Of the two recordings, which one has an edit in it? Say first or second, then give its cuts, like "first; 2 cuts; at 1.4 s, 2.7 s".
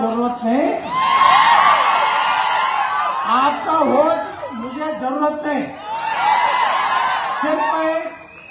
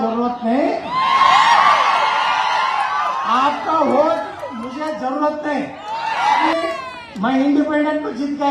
second; 1 cut; at 6.5 s